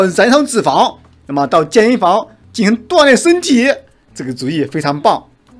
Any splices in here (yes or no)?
no